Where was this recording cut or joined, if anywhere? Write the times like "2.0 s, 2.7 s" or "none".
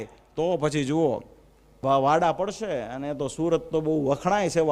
1.8 s